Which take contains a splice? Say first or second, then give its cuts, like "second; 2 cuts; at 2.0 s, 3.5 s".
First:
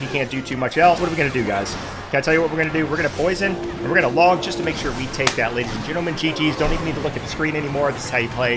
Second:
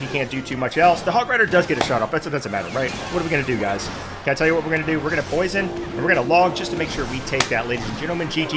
first; 1 cut; at 1.0 s